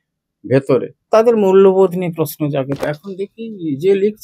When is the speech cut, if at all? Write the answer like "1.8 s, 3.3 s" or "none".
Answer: 1.0 s, 2.8 s